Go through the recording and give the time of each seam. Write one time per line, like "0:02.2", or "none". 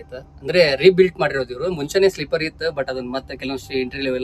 none

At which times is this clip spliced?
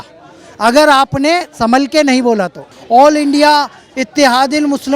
0:02.7

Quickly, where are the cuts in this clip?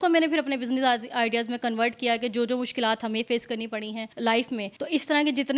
0:04.0
0:04.7

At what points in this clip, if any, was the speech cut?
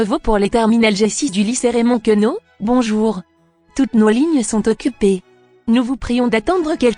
none

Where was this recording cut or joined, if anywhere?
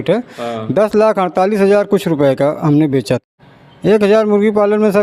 0:03.3

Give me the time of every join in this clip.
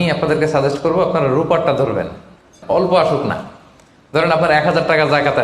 0:02.6

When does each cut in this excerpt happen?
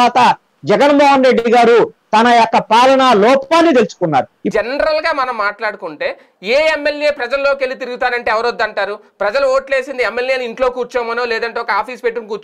0:04.4

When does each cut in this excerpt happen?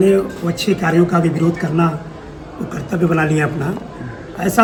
none

